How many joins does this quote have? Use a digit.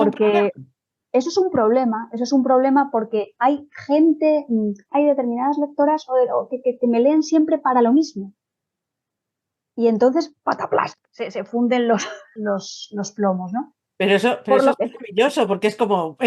2